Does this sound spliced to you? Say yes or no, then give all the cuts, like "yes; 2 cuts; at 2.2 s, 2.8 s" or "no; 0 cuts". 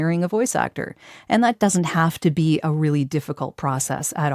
yes; 1 cut; at 1.6 s